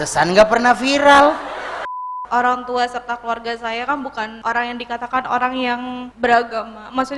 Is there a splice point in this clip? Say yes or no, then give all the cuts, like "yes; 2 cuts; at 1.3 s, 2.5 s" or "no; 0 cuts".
yes; 3 cuts; at 2.1 s, 4.3 s, 6.0 s